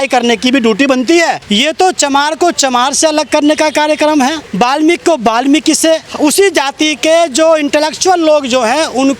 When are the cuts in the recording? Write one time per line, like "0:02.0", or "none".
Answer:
0:01.4
0:04.4
0:06.1